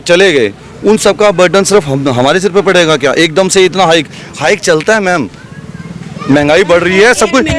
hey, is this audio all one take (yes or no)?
yes